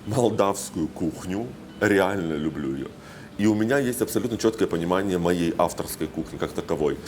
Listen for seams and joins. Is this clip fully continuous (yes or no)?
yes